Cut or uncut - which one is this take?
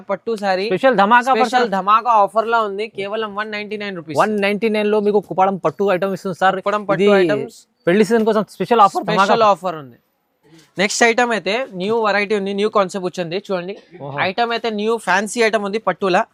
uncut